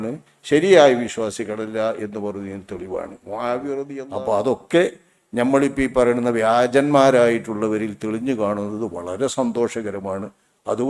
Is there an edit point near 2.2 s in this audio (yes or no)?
no